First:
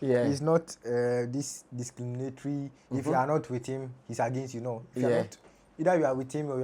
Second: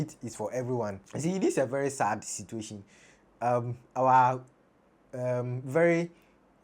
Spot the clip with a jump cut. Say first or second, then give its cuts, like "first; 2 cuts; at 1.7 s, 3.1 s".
second; 1 cut; at 1.0 s